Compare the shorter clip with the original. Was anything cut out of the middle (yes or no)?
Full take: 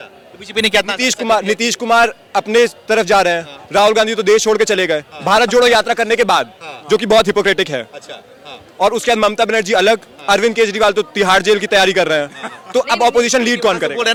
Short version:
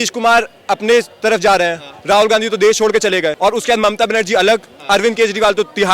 yes